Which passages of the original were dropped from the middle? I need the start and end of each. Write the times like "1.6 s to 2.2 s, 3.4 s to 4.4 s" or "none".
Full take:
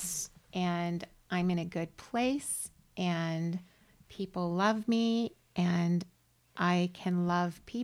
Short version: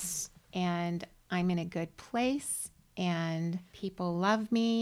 3.7 s to 4.1 s